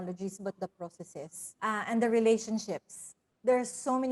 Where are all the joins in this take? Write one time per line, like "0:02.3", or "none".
0:01.4